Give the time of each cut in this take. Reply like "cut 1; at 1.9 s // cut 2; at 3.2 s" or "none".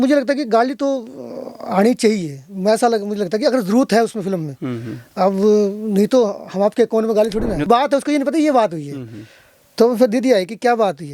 cut 1; at 7.6 s